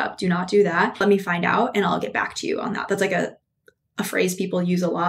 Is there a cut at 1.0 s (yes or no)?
yes